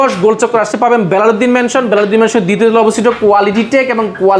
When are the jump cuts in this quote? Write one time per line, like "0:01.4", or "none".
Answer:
none